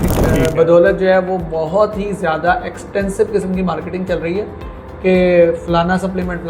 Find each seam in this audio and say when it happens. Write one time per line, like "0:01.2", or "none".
none